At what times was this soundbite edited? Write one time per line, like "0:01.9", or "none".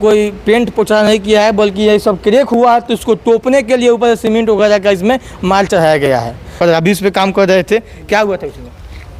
0:06.5

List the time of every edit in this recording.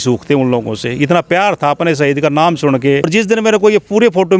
0:03.1

